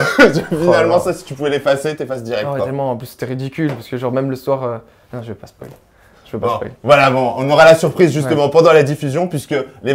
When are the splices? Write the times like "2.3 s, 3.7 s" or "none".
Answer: none